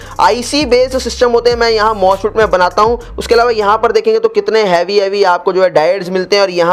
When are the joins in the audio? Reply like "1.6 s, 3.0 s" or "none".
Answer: none